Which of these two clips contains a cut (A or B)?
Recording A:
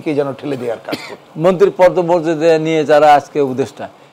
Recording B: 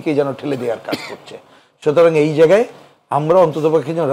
A